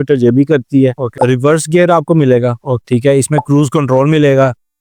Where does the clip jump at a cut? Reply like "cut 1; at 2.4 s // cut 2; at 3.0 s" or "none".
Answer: cut 1; at 1.2 s // cut 2; at 2.7 s